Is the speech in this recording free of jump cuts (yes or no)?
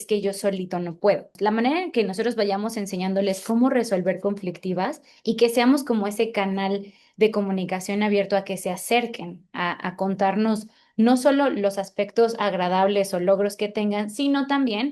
no